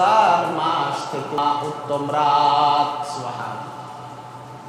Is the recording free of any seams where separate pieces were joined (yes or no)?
no